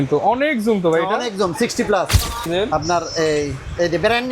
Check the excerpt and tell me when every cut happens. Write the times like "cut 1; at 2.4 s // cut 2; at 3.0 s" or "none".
cut 1; at 2.5 s